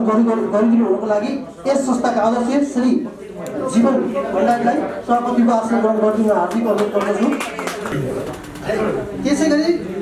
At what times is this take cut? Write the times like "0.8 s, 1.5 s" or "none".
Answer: 7.9 s